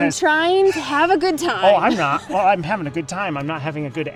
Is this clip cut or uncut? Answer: uncut